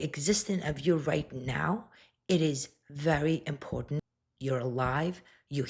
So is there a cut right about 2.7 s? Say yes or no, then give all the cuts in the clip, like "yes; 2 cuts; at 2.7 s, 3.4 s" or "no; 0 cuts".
no; 1 cut; at 4.1 s